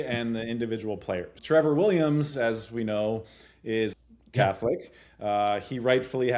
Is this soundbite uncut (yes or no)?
no